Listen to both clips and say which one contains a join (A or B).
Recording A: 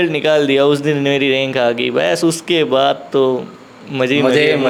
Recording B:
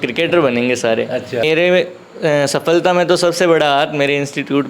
B